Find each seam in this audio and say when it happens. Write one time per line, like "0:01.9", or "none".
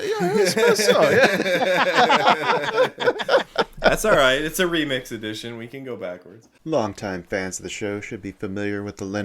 0:06.2